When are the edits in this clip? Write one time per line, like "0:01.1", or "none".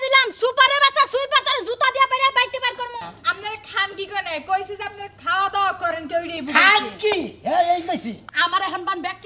0:03.0
0:08.3